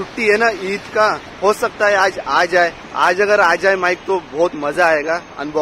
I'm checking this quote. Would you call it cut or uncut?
uncut